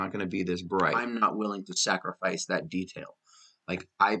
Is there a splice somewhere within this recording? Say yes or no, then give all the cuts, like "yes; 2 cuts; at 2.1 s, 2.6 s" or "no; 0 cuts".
yes; 1 cut; at 1.0 s